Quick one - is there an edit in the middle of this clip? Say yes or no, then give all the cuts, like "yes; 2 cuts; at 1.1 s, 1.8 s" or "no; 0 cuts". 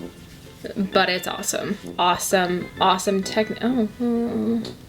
yes; 1 cut; at 1.9 s